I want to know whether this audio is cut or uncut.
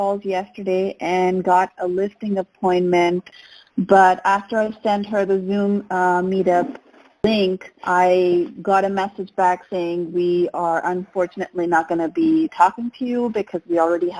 cut